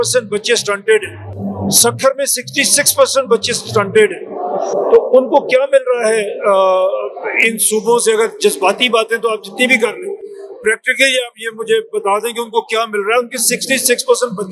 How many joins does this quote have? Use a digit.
0